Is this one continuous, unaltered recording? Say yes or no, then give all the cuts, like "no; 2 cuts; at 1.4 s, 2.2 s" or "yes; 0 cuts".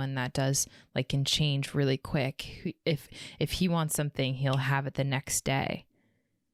yes; 0 cuts